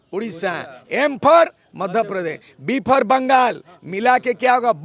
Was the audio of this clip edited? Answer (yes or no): no